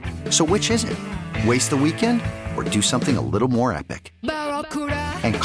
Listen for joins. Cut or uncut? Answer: uncut